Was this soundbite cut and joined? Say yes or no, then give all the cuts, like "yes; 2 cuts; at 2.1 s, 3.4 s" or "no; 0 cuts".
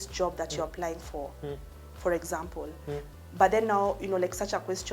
no; 0 cuts